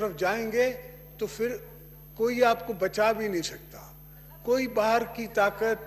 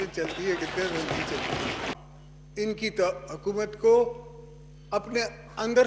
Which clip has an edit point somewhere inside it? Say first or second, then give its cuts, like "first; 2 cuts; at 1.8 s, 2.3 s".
second; 1 cut; at 1.9 s